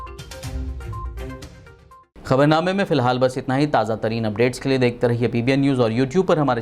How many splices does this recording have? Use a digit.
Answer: 0